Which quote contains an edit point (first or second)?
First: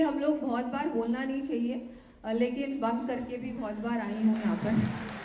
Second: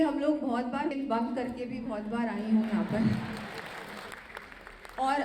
second